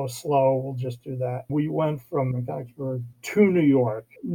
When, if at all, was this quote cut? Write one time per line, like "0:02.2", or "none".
0:01.5